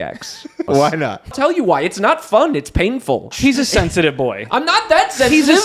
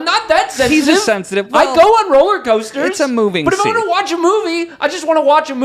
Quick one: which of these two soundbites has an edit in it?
first; 2 cuts; at 1.3 s, 3.3 s

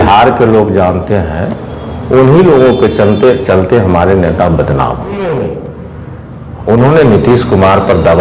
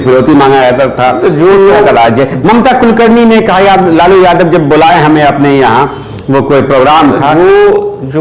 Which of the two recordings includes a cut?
first; 1 cut; at 5.2 s

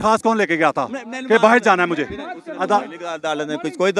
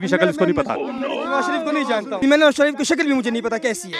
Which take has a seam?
second; 1 cut; at 2.2 s

